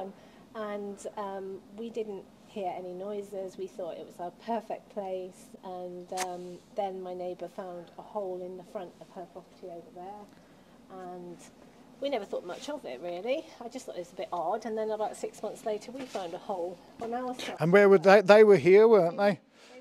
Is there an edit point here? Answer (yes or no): no